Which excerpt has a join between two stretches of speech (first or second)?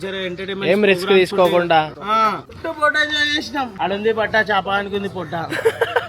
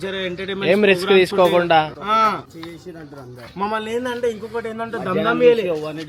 first